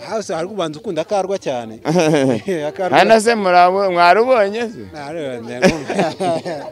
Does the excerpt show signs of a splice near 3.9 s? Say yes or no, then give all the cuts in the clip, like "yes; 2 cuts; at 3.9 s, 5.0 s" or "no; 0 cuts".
no; 0 cuts